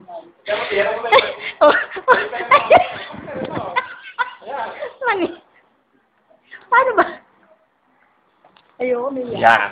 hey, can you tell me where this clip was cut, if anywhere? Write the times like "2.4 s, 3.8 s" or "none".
none